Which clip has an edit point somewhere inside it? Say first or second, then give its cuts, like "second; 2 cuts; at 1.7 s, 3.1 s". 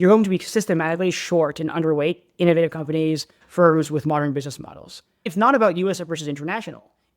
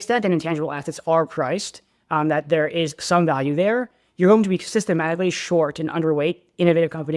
first; 1 cut; at 5.3 s